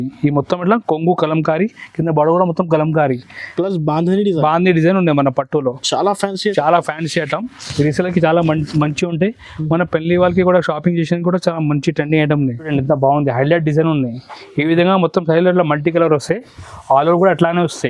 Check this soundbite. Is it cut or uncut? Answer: cut